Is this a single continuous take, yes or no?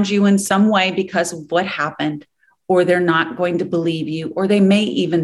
yes